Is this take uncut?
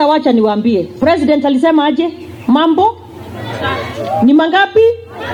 yes; 0 cuts

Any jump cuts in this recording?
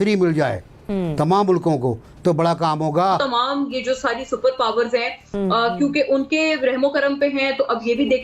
yes; 1 cut; at 3.2 s

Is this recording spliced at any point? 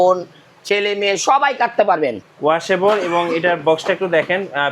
yes; 1 cut; at 2.2 s

